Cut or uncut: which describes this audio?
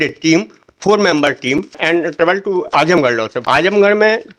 cut